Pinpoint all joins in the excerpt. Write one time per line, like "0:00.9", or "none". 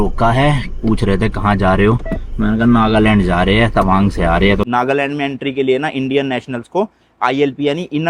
0:04.7